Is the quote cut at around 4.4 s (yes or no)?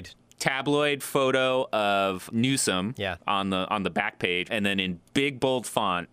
yes